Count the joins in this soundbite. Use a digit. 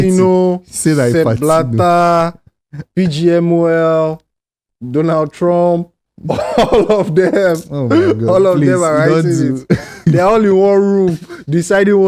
0